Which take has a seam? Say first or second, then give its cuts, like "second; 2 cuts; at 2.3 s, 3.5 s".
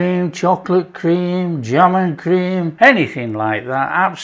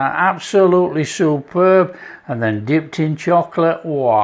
first; 1 cut; at 2.7 s